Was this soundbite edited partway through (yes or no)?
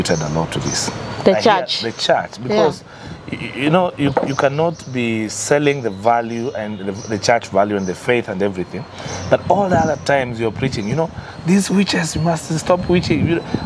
no